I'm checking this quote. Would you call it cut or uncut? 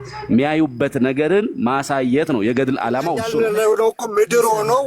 cut